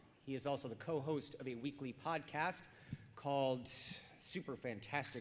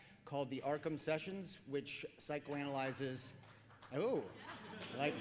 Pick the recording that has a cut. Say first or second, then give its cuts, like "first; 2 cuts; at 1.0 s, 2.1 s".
first; 1 cut; at 1.8 s